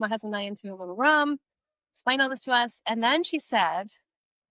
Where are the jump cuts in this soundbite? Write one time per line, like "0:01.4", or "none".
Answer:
none